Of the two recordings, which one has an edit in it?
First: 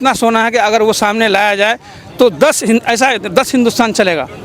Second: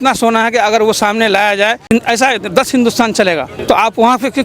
second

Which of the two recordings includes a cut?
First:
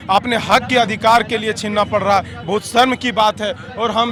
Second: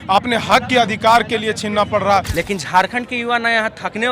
second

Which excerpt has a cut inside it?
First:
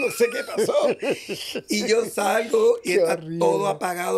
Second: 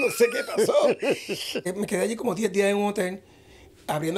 second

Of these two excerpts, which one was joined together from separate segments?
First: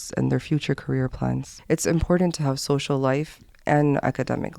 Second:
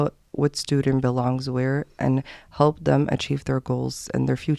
first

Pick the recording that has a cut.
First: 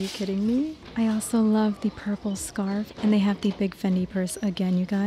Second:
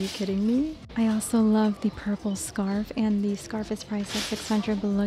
first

